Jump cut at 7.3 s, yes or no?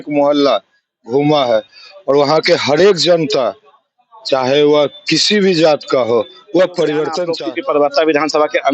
yes